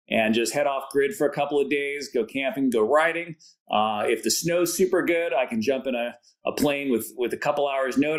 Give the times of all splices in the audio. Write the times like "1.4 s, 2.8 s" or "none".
none